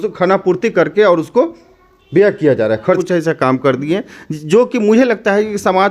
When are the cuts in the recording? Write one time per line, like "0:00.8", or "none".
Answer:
0:03.0